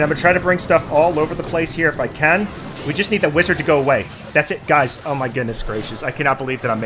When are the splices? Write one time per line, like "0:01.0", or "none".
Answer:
none